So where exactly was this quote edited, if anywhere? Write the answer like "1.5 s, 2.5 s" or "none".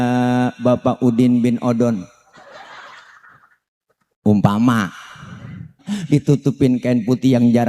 5.9 s